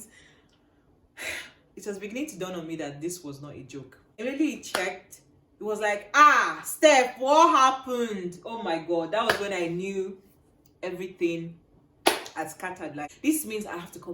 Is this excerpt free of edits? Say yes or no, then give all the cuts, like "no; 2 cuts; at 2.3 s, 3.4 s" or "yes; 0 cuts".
no; 2 cuts; at 4.0 s, 13.1 s